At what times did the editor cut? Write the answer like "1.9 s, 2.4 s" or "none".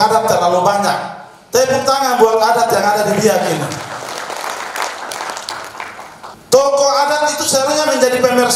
6.4 s